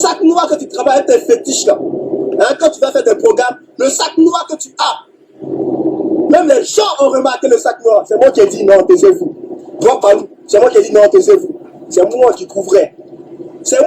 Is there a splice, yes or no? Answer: no